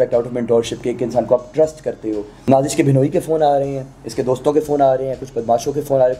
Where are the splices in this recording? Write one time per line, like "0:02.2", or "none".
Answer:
0:02.3